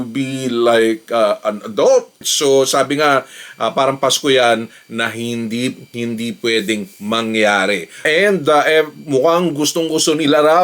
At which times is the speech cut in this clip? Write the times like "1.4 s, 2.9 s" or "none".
2.3 s, 8.0 s